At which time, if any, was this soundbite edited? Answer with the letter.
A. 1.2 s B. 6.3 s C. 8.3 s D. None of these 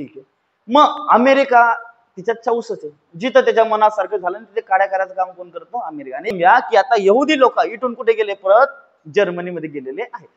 B